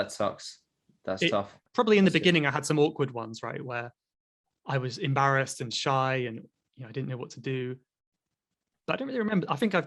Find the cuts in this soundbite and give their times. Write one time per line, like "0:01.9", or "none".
0:01.7

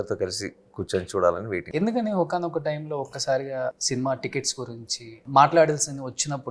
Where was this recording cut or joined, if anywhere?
0:01.7

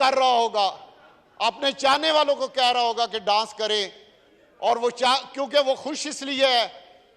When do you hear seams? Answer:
none

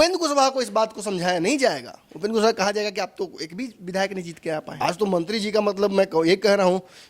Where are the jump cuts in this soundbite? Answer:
0:04.7

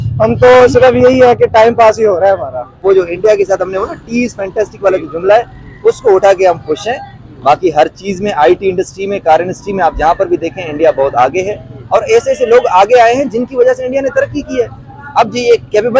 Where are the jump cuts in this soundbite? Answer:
0:02.8

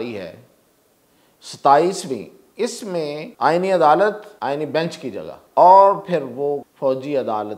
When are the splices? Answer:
0:03.3
0:04.3
0:05.4
0:06.7

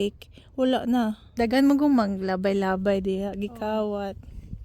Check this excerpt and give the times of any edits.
0:01.2

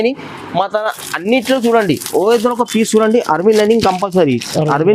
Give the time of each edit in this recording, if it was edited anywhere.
none

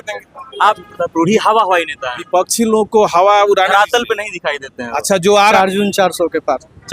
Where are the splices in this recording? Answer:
0:00.8
0:05.5

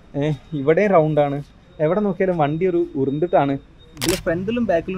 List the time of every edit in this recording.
0:03.9

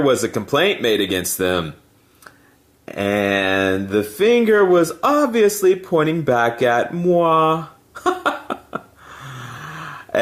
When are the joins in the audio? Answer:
none

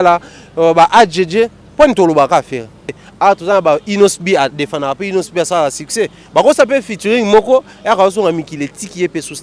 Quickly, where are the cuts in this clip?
0:03.1

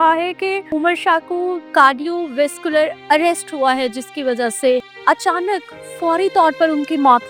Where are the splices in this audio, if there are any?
0:00.7
0:01.7
0:03.0
0:04.9

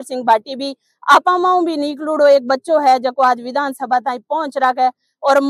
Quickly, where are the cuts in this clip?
none

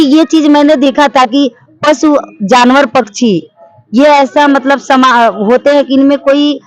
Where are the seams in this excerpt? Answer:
none

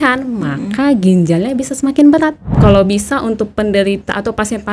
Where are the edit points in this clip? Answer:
0:02.5

